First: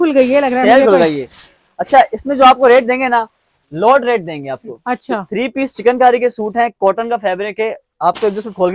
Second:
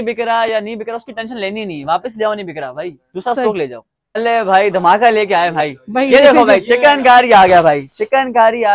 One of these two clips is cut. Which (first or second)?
second